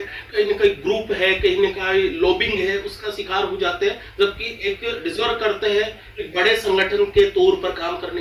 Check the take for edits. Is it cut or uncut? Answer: uncut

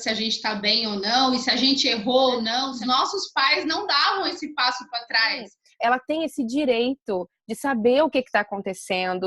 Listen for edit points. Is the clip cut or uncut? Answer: cut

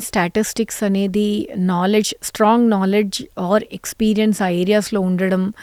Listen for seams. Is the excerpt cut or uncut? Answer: uncut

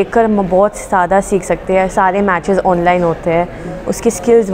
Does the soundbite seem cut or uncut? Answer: uncut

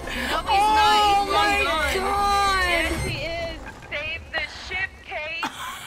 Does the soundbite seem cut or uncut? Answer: cut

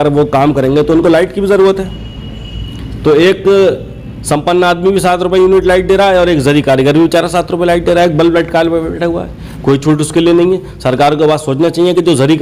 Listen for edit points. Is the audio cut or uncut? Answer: uncut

